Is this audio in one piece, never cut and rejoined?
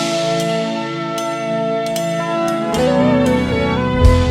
no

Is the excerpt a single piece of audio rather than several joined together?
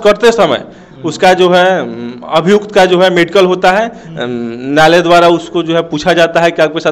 yes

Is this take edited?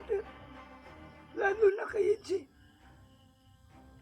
no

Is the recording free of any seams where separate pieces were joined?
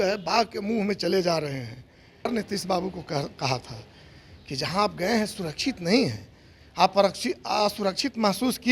no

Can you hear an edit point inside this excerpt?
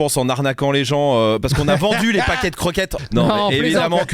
yes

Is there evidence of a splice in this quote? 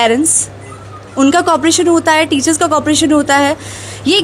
no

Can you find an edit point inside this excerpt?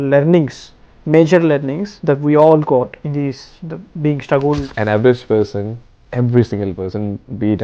yes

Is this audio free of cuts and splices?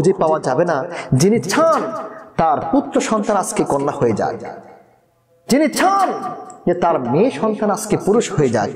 yes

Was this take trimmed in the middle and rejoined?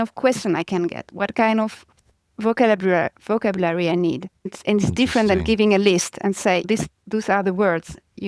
no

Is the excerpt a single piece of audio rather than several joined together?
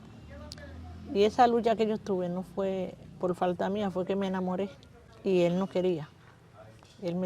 no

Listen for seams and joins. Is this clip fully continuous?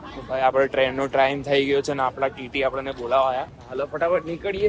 yes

